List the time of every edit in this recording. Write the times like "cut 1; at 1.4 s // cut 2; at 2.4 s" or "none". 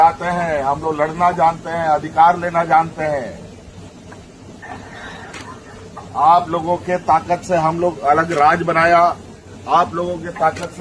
none